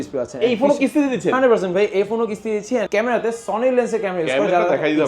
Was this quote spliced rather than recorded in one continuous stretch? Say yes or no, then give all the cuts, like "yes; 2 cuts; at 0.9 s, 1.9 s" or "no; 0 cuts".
yes; 1 cut; at 2.9 s